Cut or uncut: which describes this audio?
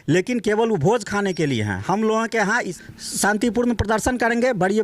cut